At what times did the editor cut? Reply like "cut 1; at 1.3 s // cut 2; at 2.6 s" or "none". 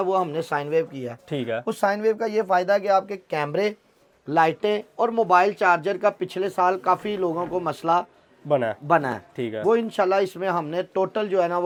none